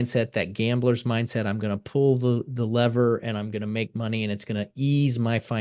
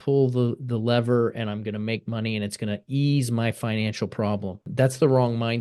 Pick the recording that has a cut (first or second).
second